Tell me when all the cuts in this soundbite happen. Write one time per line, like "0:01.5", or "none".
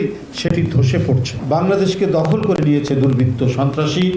0:01.3